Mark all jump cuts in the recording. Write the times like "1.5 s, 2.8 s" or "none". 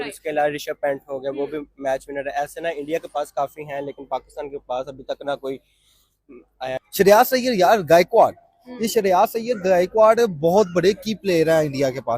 6.8 s